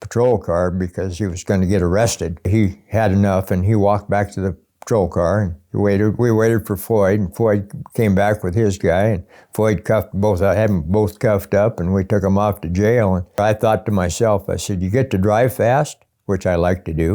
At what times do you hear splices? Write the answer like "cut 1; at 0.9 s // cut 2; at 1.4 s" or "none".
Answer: cut 1; at 2.5 s // cut 2; at 13.4 s